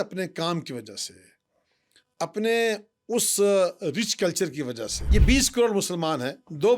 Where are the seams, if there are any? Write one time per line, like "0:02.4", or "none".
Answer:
0:04.9